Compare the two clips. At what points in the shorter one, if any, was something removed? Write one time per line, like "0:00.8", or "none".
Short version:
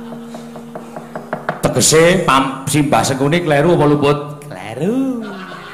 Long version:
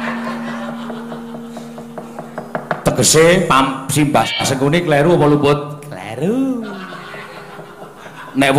0:03.1